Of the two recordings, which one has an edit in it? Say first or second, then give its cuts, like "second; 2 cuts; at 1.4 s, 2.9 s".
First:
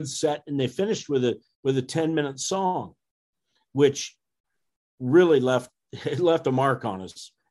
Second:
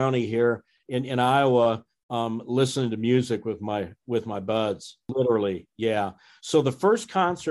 second; 1 cut; at 5.1 s